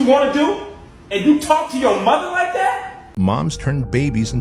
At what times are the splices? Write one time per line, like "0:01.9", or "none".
0:03.1